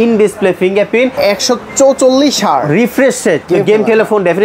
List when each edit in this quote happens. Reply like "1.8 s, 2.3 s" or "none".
1.1 s, 3.4 s